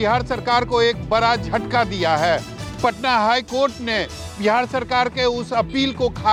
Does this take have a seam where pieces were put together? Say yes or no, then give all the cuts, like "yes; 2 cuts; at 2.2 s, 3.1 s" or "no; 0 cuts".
no; 0 cuts